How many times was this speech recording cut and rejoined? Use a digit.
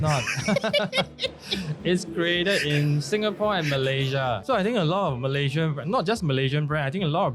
1